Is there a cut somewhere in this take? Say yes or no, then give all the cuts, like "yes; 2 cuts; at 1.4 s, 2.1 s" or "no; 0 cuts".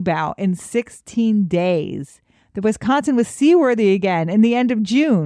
no; 0 cuts